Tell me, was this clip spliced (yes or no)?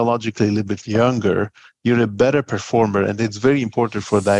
no